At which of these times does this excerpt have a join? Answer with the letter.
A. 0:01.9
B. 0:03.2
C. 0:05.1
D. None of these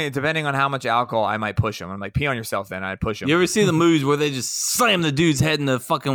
B